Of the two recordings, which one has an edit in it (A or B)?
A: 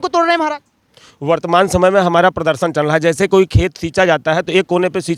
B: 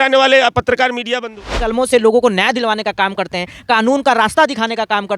B